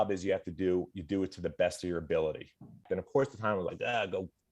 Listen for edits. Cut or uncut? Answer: cut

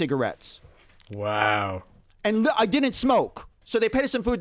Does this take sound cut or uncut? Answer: uncut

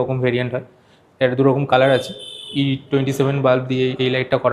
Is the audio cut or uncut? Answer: uncut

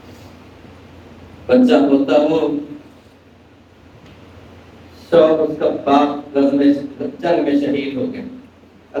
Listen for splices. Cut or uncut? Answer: uncut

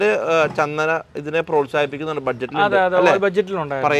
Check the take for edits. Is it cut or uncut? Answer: uncut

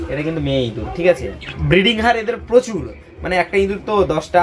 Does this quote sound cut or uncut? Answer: cut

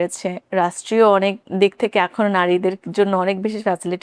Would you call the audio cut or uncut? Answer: cut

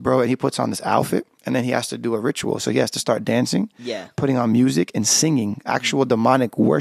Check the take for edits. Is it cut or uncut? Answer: uncut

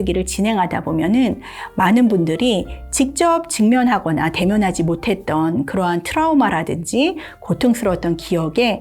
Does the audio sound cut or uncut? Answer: uncut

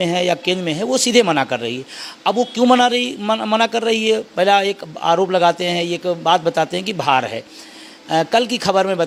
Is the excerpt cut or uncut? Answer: uncut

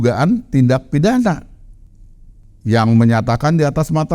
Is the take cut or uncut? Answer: cut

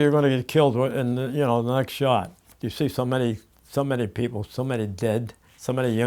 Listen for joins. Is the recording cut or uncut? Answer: cut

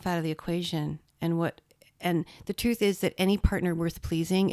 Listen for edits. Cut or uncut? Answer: uncut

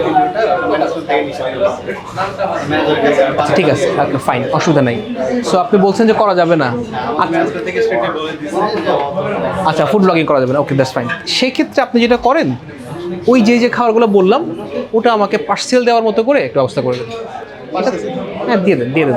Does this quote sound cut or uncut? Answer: uncut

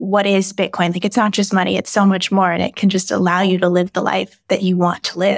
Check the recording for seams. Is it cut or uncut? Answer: uncut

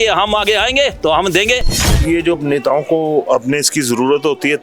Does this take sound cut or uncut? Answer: cut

